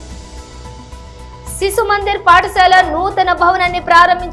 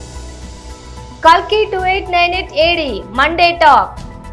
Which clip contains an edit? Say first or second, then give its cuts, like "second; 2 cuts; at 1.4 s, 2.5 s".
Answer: second; 1 cut; at 1.2 s